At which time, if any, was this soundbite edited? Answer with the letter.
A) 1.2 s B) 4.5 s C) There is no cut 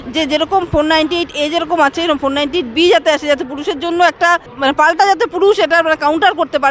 B